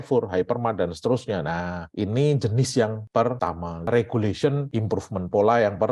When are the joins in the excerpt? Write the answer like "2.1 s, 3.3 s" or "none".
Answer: 3.3 s, 4.6 s